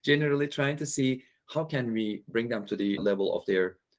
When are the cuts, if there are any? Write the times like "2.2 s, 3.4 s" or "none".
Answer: 2.6 s